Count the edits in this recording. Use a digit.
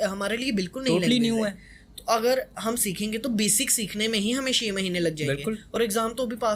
0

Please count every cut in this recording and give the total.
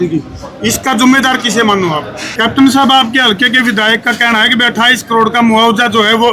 1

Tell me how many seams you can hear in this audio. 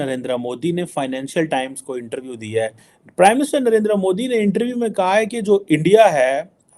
1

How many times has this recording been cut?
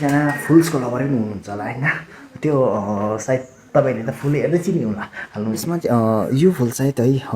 1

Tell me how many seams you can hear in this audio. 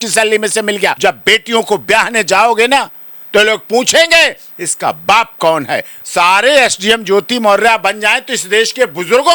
2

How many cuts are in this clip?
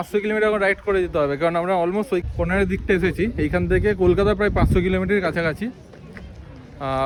0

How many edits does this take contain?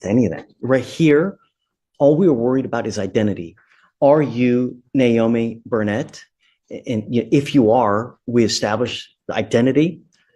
0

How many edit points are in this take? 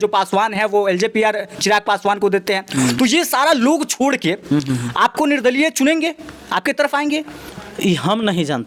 0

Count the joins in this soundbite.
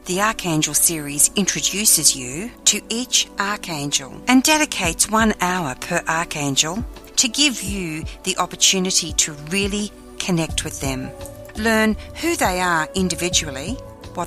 0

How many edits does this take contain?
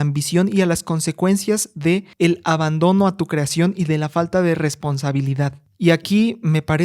2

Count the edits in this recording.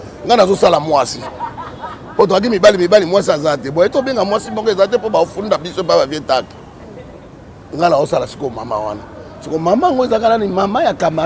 0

